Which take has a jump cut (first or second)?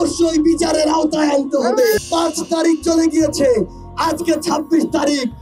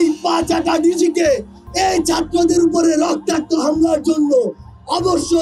first